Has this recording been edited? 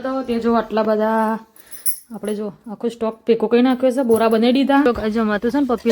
yes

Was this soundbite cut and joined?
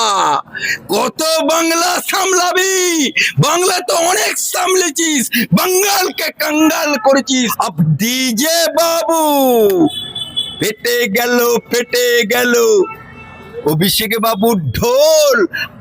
yes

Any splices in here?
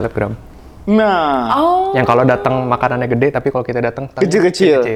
no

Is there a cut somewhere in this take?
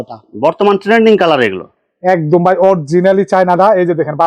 no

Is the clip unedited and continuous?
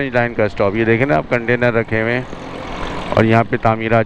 yes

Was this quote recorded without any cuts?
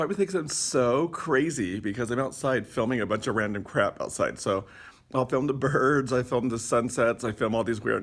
yes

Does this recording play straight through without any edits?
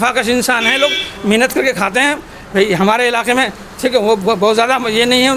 yes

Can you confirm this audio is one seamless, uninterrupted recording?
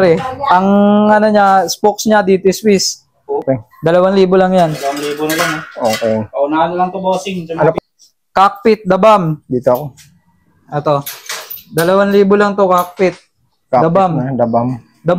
no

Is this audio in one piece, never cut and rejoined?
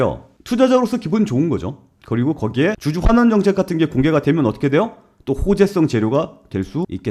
yes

